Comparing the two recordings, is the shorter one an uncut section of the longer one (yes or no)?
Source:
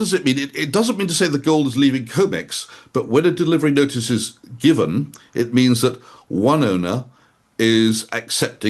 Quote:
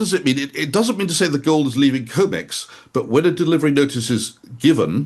yes